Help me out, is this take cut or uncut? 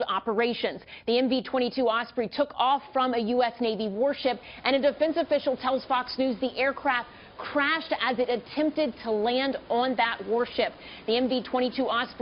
cut